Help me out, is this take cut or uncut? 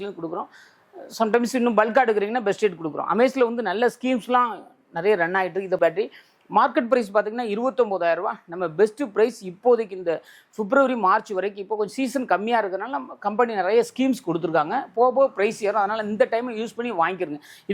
cut